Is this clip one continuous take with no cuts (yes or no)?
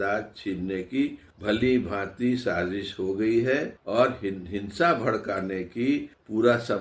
yes